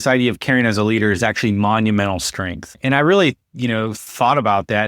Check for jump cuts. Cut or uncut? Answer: cut